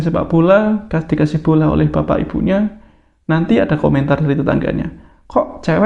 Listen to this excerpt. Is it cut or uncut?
uncut